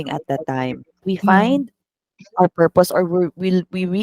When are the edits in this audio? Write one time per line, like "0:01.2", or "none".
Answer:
0:01.0